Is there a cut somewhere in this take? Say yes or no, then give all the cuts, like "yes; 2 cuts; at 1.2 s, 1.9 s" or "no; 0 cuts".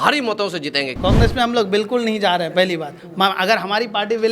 yes; 1 cut; at 0.9 s